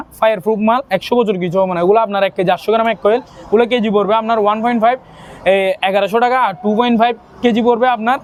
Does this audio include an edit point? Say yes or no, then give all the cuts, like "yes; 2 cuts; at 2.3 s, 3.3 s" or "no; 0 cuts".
no; 0 cuts